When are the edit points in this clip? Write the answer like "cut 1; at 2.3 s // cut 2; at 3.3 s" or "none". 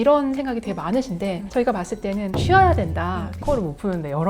cut 1; at 2.3 s // cut 2; at 3.4 s